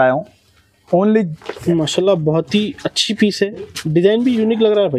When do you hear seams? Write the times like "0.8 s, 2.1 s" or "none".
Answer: 1.4 s